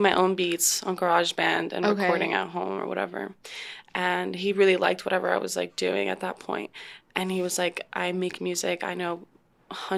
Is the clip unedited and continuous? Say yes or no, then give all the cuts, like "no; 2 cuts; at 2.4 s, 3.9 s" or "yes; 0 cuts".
yes; 0 cuts